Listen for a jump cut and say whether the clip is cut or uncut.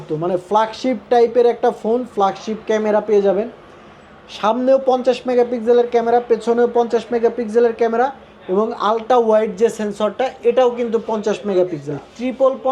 uncut